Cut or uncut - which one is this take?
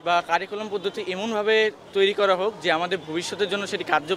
uncut